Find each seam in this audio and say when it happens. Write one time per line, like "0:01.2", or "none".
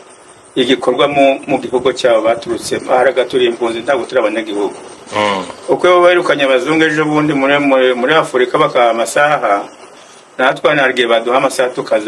none